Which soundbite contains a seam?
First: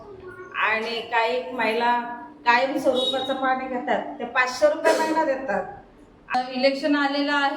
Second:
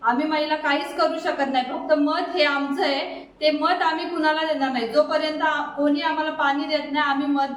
first; 1 cut; at 6.3 s

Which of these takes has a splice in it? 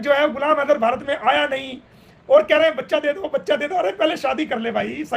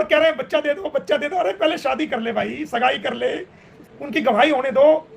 second; 1 cut; at 3.8 s

